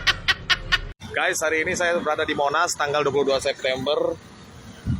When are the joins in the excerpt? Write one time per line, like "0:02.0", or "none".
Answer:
none